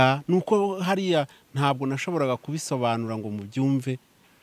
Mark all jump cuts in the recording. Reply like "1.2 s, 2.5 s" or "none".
none